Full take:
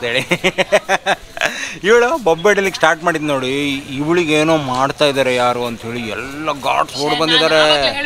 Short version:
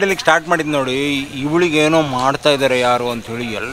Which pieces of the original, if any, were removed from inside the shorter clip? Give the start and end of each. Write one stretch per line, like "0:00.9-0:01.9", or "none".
none